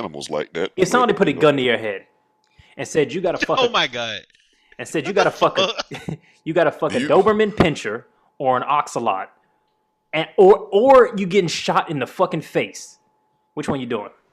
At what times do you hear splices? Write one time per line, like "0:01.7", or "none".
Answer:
none